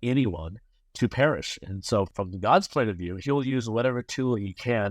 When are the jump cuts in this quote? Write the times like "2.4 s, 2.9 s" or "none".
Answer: 2.1 s